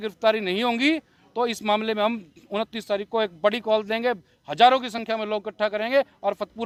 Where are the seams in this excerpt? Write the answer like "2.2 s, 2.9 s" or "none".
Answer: none